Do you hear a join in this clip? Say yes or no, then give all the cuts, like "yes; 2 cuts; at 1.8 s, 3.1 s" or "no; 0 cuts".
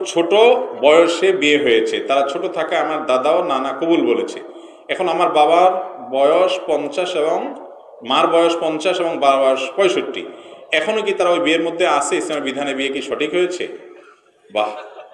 no; 0 cuts